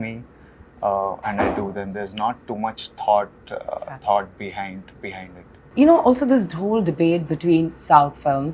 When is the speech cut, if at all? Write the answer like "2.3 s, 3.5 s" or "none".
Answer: none